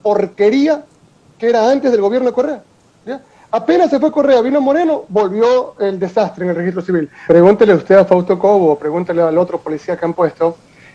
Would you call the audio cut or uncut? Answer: cut